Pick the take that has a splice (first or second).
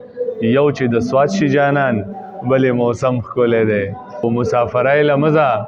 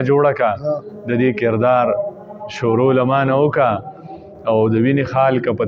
first